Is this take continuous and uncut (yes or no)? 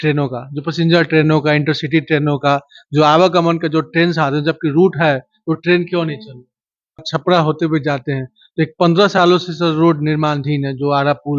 no